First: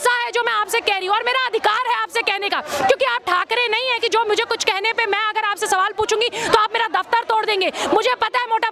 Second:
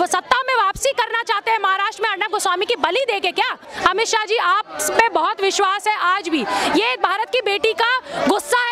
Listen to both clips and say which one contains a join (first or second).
second